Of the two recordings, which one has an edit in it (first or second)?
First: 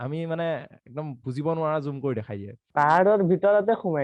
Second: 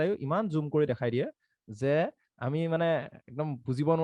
first